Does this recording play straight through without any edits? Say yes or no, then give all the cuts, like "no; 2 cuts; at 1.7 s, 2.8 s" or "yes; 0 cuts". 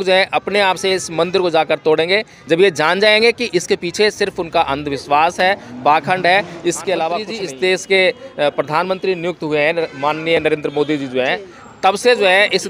no; 1 cut; at 7.3 s